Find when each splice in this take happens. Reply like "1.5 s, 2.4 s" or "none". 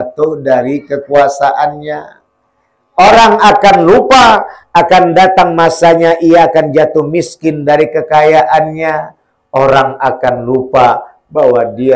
none